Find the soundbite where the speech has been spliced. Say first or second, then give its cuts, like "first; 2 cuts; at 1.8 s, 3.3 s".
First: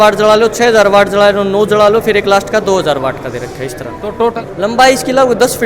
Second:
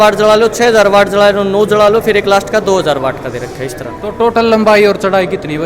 first; 1 cut; at 4.3 s